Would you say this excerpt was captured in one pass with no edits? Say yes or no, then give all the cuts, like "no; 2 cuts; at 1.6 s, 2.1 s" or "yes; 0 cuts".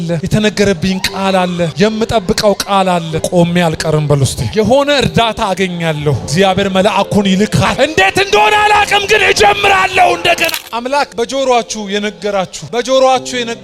no; 3 cuts; at 3.2 s, 7.7 s, 10.6 s